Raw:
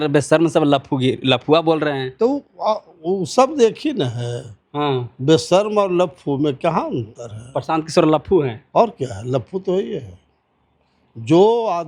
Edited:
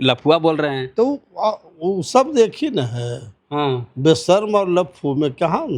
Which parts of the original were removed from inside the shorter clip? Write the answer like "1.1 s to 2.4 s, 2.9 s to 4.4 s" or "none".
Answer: none